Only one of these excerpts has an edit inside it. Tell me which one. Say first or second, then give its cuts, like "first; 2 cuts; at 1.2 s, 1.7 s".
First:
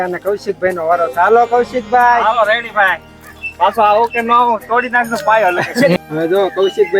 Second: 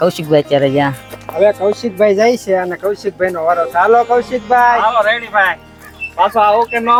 first; 1 cut; at 6.0 s